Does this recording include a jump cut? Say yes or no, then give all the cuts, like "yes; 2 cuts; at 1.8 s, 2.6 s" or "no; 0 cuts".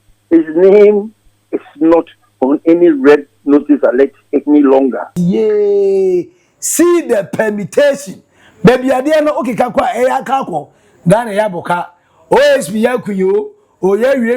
yes; 1 cut; at 5.1 s